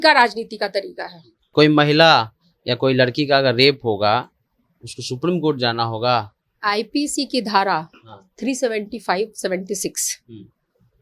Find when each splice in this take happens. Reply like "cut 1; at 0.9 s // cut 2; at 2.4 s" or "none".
cut 1; at 1.4 s